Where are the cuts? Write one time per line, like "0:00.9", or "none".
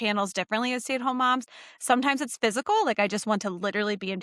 none